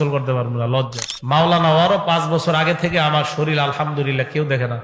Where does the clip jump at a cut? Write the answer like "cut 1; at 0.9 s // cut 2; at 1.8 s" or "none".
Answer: cut 1; at 1.1 s